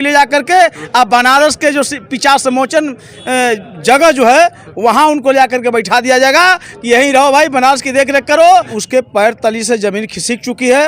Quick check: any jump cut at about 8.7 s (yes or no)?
yes